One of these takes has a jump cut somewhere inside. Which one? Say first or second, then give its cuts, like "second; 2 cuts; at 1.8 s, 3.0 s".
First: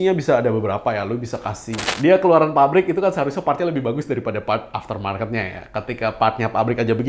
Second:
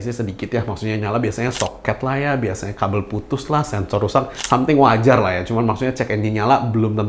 first; 1 cut; at 1.9 s